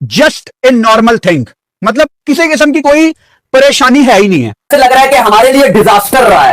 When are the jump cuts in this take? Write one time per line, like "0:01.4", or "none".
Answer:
0:04.5